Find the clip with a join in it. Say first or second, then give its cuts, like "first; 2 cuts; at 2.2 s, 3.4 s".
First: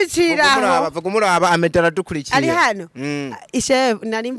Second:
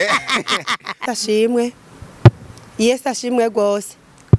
second; 1 cut; at 1.0 s